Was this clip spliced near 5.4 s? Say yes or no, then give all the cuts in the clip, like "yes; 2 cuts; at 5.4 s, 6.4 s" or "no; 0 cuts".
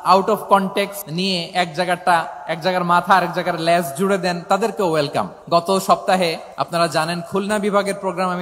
yes; 3 cuts; at 1.0 s, 5.4 s, 6.5 s